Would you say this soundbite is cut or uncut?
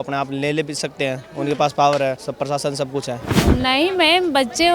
cut